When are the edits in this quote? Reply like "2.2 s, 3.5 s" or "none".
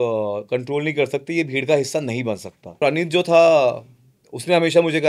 2.7 s